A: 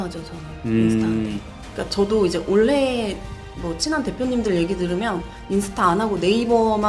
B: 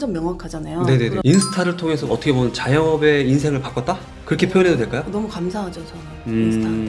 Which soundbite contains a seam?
B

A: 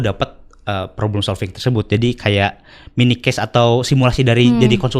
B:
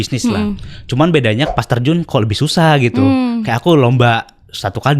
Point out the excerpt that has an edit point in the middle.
B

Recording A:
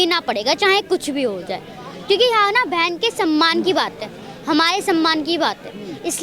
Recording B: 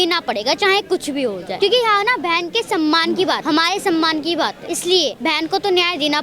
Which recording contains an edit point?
B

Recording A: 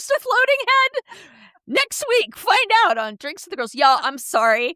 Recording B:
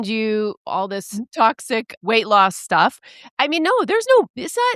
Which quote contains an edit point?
B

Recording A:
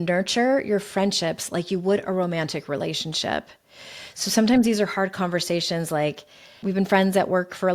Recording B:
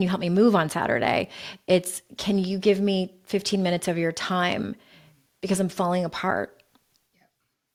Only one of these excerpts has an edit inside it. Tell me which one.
A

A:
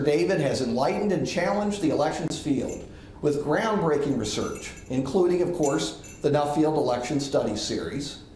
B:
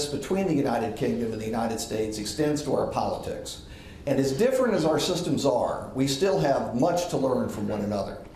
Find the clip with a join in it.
A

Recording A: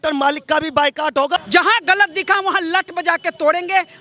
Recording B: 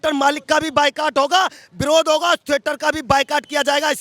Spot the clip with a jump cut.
A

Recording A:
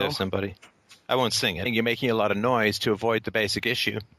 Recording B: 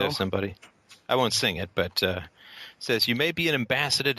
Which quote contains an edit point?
B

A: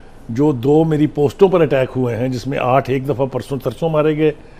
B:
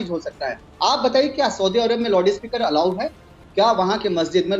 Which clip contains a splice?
B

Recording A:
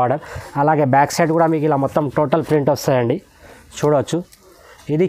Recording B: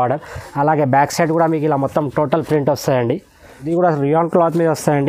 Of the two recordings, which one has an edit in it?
B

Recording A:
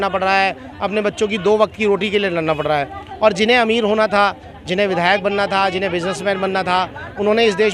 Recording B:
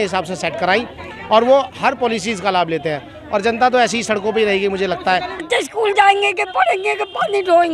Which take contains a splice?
B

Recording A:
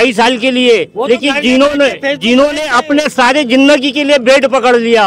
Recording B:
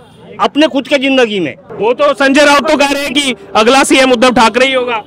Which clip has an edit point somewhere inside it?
B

